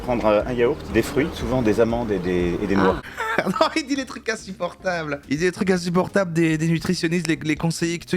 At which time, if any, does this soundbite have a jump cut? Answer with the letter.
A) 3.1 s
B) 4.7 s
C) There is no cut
A